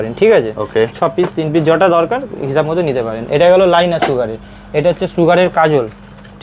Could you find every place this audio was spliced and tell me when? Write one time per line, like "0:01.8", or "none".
none